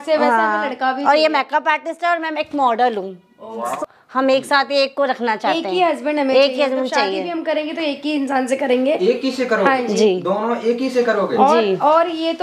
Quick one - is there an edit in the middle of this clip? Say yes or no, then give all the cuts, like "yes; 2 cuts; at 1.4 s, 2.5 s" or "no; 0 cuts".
yes; 1 cut; at 3.7 s